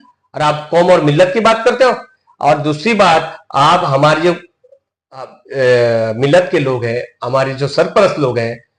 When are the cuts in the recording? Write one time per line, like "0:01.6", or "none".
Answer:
none